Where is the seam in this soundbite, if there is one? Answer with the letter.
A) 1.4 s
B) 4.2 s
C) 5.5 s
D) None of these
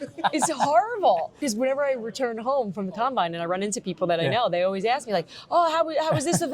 A